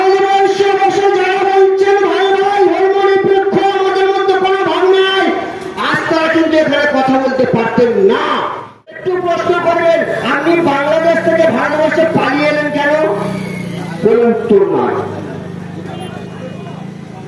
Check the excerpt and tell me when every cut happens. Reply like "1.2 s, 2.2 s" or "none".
9.0 s